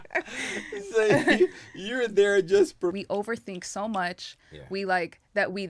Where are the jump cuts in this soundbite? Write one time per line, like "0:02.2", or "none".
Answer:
0:03.0